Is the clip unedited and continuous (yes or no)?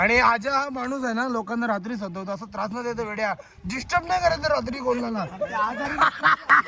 yes